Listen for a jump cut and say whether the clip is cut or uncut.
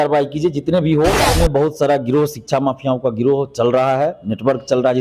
cut